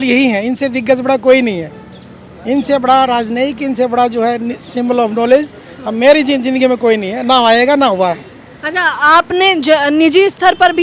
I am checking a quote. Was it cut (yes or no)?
no